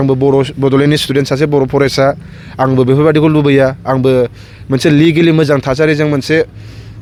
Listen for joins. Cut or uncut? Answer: uncut